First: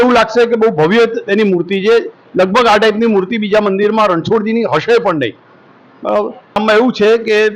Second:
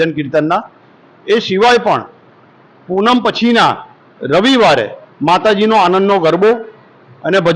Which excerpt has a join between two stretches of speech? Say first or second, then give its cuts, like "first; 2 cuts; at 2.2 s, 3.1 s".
first; 1 cut; at 6.6 s